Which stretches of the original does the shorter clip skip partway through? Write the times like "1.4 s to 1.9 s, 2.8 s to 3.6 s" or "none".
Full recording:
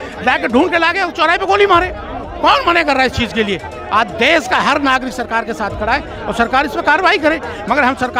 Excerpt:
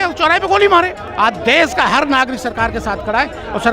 2.0 s to 3.8 s